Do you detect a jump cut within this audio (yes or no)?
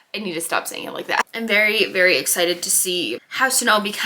yes